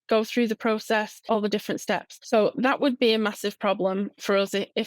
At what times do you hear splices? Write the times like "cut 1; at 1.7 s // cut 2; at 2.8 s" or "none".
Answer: cut 1; at 1.2 s // cut 2; at 2.1 s